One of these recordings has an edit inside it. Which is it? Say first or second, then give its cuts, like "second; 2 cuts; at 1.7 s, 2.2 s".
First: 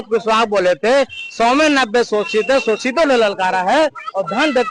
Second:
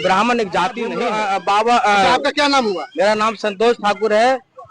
second; 1 cut; at 1.0 s